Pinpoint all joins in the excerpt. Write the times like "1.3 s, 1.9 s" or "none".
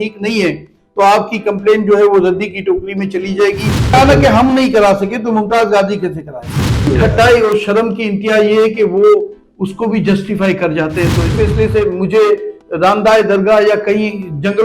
3.9 s, 6.9 s, 11.3 s